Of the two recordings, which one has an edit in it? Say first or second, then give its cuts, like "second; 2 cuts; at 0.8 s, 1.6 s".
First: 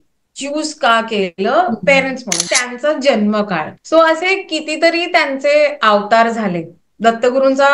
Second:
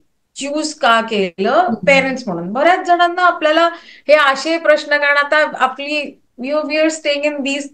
first; 1 cut; at 2.5 s